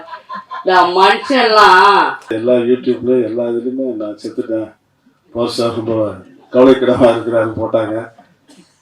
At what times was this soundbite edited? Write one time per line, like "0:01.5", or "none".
0:02.3